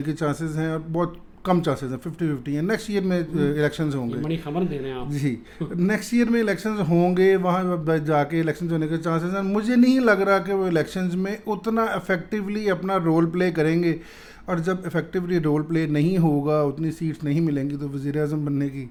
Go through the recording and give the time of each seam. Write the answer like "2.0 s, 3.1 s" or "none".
none